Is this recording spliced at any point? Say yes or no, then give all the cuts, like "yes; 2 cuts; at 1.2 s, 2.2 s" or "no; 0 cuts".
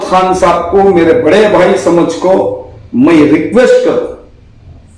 no; 0 cuts